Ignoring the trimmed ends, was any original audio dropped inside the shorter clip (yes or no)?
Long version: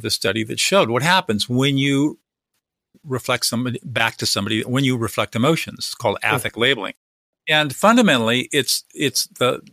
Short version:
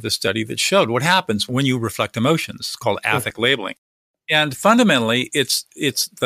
yes